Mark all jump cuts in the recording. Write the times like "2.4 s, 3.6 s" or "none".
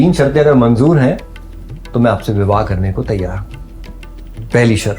none